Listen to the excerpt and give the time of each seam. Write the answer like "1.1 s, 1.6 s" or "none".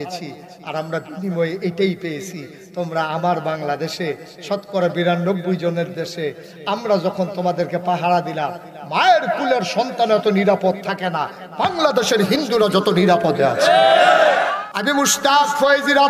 14.5 s